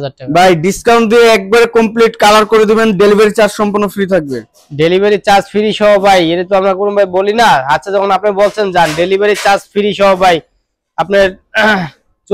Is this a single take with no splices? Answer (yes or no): yes